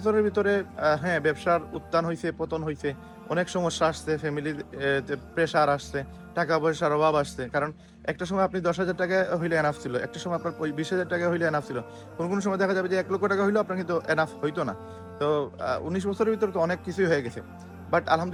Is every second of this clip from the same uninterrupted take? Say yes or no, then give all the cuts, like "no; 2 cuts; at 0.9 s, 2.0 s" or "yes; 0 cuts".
yes; 0 cuts